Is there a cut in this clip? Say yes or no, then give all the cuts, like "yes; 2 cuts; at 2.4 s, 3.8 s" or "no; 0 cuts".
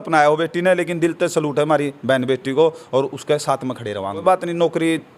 yes; 1 cut; at 4.2 s